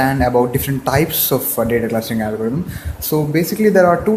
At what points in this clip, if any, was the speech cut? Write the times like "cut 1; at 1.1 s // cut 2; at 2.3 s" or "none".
cut 1; at 1.6 s